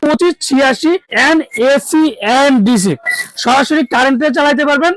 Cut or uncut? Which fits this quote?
cut